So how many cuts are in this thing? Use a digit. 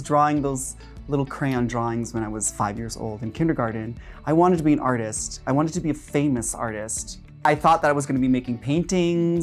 1